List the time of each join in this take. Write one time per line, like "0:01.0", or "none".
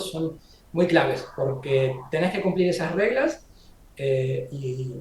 none